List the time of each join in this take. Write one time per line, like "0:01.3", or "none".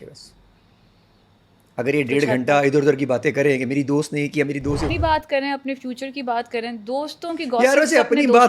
0:05.0

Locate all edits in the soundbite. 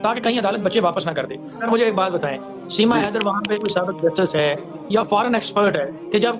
0:01.5

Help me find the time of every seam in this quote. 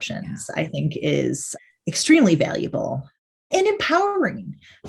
0:03.5

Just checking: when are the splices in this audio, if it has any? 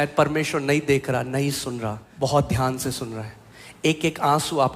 0:02.0

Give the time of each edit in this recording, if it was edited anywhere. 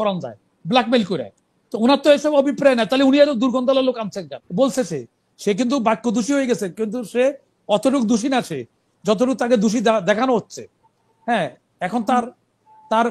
0:04.4

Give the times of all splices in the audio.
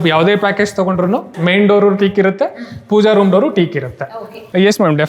0:01.4
0:04.1

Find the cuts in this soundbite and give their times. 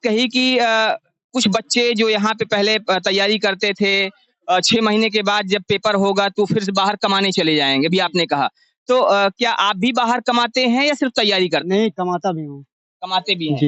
none

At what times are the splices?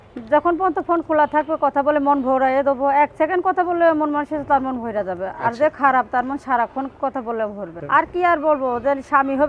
0:07.7

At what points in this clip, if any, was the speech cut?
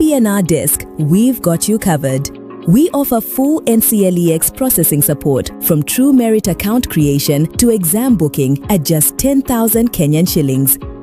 none

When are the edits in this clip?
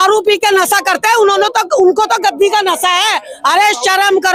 none

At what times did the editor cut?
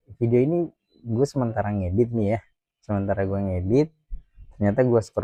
none

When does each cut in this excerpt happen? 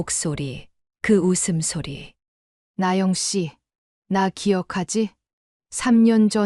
0:02.6

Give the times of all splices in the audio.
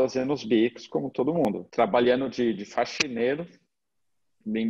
0:01.5

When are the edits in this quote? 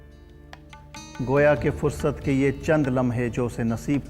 none

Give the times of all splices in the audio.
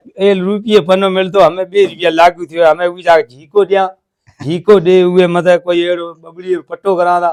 none

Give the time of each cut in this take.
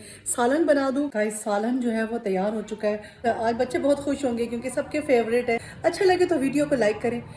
0:01.1
0:03.1
0:05.7

